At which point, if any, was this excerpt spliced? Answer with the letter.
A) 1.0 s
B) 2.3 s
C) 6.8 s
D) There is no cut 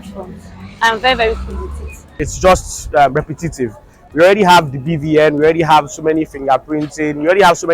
B